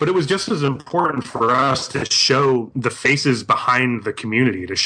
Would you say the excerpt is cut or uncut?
uncut